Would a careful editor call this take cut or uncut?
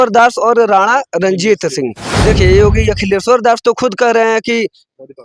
cut